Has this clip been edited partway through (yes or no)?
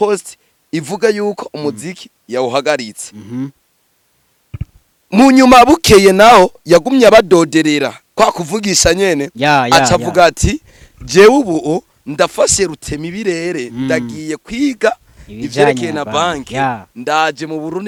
no